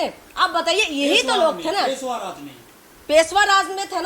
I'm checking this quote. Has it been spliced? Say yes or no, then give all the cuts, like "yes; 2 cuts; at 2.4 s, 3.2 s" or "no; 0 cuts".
no; 0 cuts